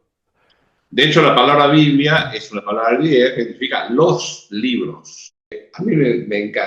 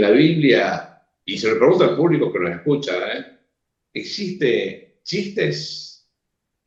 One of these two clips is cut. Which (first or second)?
first